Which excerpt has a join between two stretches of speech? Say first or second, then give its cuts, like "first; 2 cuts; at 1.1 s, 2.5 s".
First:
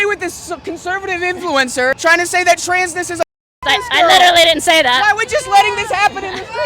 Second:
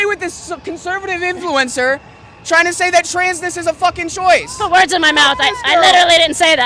first; 2 cuts; at 2.0 s, 3.4 s